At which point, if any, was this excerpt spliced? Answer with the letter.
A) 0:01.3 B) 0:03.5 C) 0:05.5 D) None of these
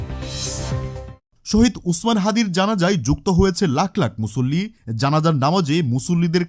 D